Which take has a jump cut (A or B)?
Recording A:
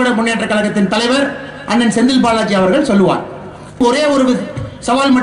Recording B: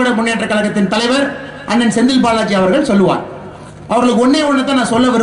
A